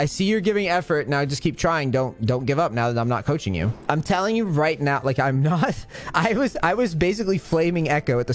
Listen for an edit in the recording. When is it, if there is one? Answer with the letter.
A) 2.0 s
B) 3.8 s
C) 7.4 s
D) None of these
B